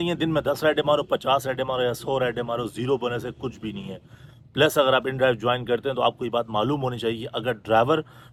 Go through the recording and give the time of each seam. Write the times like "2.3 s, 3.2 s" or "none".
none